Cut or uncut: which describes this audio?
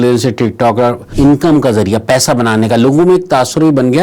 cut